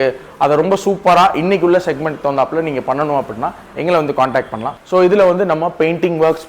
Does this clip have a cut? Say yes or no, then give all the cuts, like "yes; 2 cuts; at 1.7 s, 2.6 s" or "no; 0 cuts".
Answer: yes; 1 cut; at 4.7 s